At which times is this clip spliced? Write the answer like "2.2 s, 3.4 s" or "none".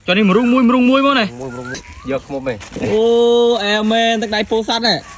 1.8 s